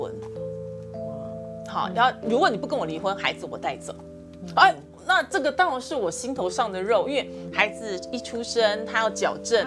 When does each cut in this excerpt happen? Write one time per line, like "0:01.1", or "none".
none